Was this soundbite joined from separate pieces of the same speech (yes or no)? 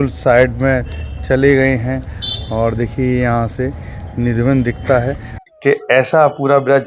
yes